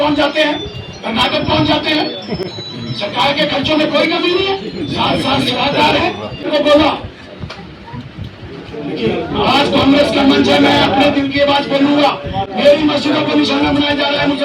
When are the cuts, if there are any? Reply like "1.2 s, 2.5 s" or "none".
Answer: 6.5 s